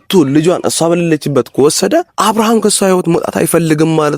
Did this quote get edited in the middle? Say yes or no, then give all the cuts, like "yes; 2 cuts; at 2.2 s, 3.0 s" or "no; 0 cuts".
yes; 1 cut; at 2.1 s